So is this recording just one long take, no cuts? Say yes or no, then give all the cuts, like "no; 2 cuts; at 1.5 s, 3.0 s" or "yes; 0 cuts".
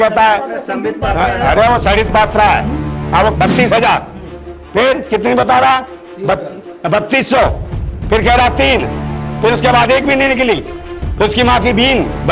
no; 1 cut; at 3.3 s